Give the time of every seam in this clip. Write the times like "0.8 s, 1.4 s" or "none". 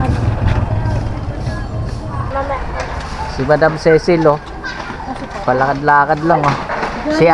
2.3 s